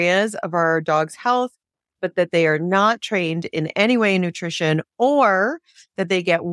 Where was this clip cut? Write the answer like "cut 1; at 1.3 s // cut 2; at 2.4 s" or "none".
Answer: none